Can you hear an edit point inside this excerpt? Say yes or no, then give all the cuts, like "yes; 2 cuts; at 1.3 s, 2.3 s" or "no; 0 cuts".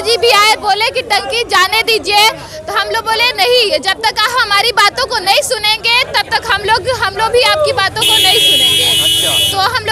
no; 0 cuts